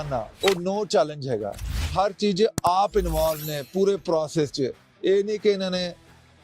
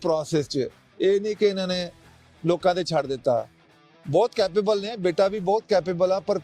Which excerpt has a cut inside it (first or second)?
first